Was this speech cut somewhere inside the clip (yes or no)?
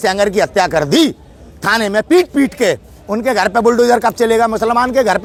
no